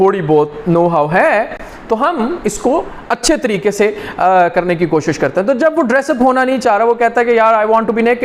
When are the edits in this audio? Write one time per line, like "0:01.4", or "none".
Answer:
none